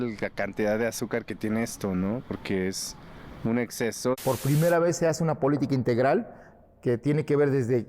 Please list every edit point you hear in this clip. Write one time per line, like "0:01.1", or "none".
0:04.2